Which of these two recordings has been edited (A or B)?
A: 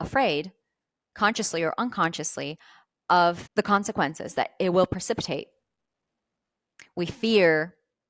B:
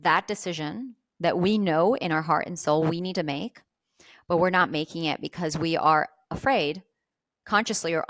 A